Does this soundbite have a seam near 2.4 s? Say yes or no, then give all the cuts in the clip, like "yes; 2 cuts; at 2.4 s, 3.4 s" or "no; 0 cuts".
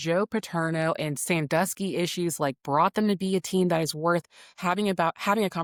no; 0 cuts